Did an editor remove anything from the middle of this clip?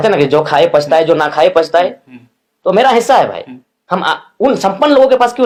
no; 0 cuts

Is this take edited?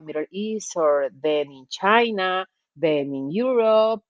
no; 0 cuts

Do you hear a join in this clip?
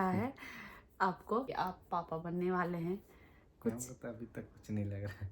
yes; 1 cut; at 1.5 s

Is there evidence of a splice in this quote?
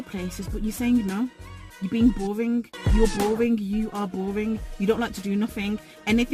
no; 0 cuts

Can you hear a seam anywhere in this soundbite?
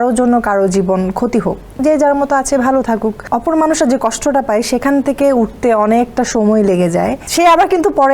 yes; 3 cuts; at 1.6 s, 3.2 s, 7.2 s

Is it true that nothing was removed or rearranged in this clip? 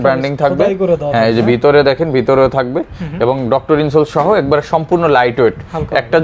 yes; 0 cuts

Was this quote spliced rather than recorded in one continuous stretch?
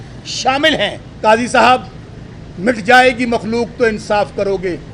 yes; 1 cut; at 1.0 s

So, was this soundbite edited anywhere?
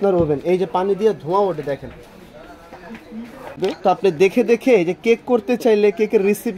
yes; 1 cut; at 3.6 s

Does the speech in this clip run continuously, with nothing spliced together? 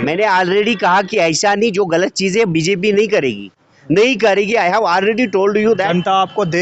yes; 0 cuts

